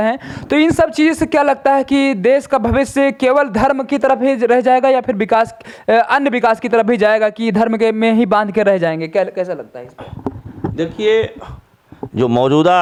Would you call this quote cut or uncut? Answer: uncut